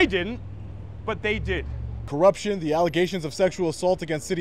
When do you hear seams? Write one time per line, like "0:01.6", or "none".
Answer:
0:02.1